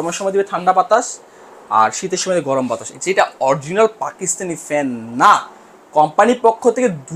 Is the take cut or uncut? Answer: cut